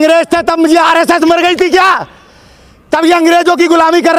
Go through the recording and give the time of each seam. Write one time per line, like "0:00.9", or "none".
none